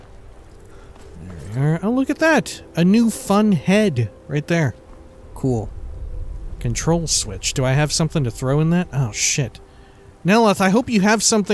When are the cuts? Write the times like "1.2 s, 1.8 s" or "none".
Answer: none